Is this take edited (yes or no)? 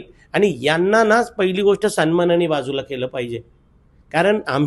no